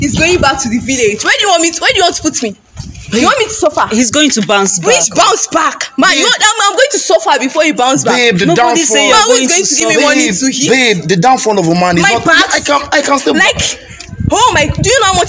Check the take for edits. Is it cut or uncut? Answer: uncut